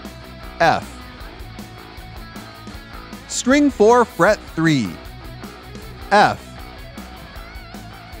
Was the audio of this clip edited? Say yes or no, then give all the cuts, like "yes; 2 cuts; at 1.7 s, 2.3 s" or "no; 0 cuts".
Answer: yes; 3 cuts; at 1.2 s, 3.4 s, 6.7 s